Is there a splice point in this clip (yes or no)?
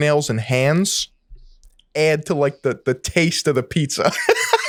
no